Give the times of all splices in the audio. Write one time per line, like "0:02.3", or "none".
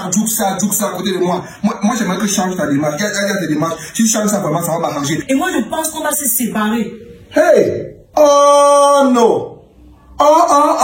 0:05.3
0:07.9